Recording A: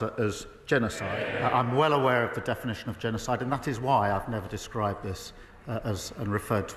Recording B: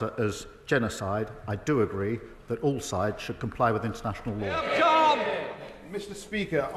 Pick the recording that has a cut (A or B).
A